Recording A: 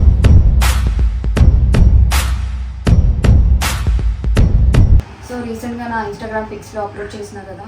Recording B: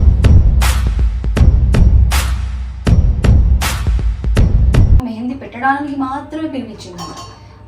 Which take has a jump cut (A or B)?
B